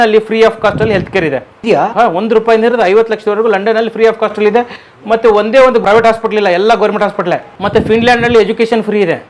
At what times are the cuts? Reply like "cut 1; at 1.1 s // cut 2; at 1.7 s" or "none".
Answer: none